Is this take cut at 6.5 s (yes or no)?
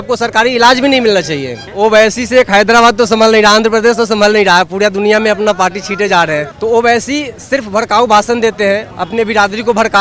yes